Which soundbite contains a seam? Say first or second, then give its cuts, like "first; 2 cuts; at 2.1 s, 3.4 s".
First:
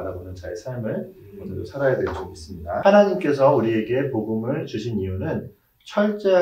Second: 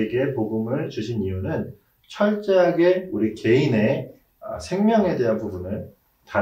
first; 1 cut; at 2.8 s